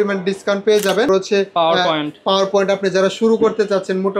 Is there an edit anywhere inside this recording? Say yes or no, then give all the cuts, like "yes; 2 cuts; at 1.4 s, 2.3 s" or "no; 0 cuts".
yes; 1 cut; at 1.1 s